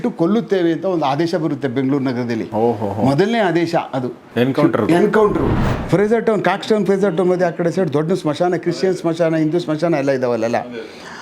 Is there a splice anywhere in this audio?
yes; 1 cut; at 5.6 s

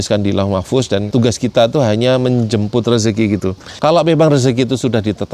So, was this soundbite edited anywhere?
yes; 2 cuts; at 1.1 s, 3.6 s

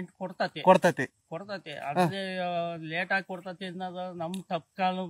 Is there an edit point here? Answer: no; 0 cuts

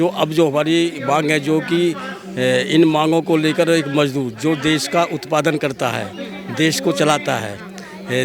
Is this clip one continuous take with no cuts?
yes; 0 cuts

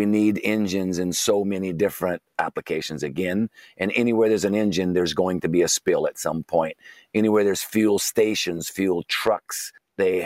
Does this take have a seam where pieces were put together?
no; 0 cuts

